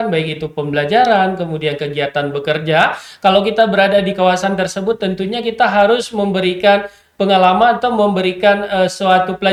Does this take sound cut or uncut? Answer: uncut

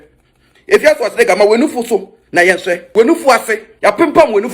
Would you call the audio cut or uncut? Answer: cut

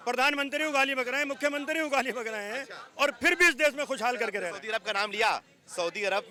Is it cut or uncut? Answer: uncut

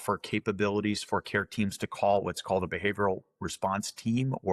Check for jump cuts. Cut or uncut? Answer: uncut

